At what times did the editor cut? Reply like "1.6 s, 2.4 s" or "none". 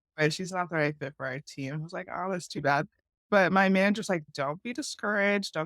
3.3 s, 4.3 s